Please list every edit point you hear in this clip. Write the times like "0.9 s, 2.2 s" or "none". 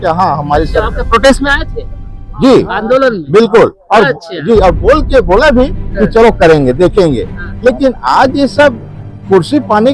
none